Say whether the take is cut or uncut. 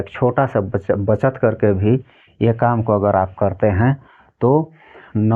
uncut